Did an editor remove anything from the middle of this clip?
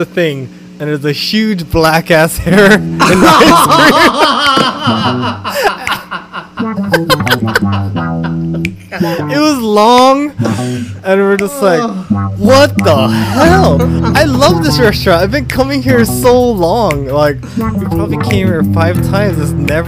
no; 0 cuts

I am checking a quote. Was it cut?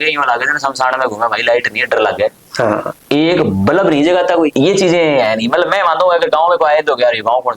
no; 0 cuts

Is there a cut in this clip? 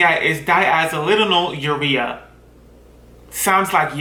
no; 0 cuts

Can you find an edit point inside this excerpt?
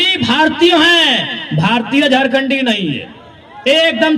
no; 0 cuts

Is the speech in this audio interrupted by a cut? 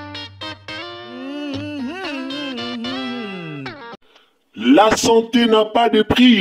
yes; 1 cut; at 3.9 s

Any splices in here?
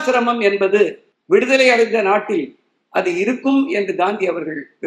yes; 1 cut; at 1.1 s

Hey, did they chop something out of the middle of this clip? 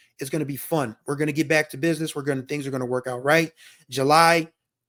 no; 0 cuts

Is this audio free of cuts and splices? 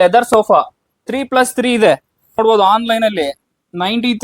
no; 1 cut; at 2.4 s

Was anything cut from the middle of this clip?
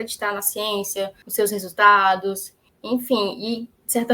yes; 1 cut; at 1.2 s

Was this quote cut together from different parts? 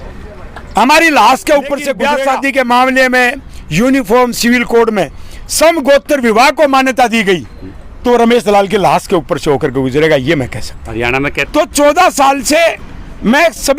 yes; 2 cuts; at 2.0 s, 11.4 s

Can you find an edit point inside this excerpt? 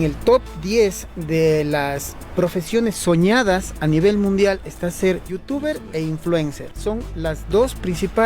yes; 2 cuts; at 5.4 s, 6.7 s

